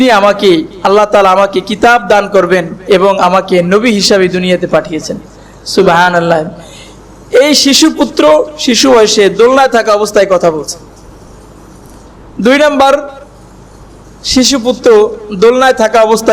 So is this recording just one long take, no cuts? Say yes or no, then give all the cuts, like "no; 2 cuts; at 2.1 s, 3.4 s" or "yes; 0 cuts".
yes; 0 cuts